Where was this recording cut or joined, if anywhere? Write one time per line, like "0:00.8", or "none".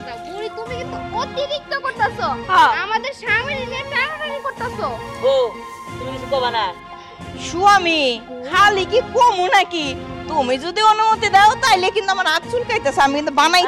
none

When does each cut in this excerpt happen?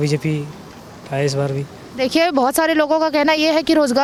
none

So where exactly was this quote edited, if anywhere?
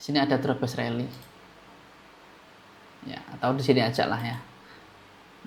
none

